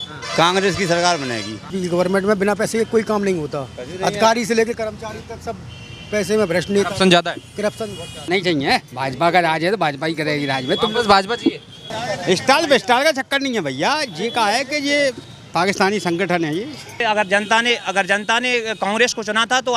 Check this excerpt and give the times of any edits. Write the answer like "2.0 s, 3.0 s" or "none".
1.6 s, 8.1 s, 11.9 s, 17.0 s